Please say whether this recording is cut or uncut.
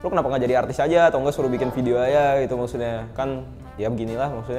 uncut